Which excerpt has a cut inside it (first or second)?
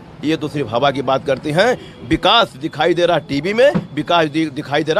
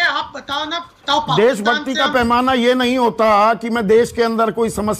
second